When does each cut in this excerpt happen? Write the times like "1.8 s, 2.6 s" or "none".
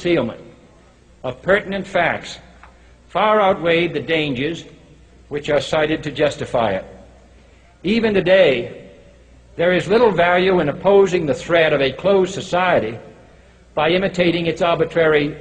5.0 s

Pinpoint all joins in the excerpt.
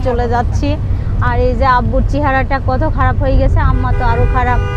none

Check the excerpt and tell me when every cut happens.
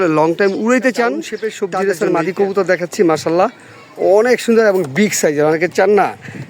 1.5 s

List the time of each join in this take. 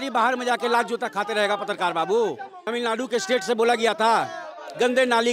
2.6 s

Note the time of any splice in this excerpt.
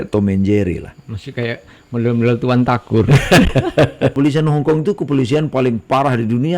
4.1 s

